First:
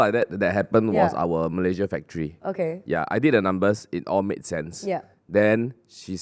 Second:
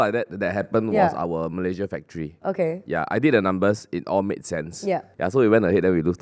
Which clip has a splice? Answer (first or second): second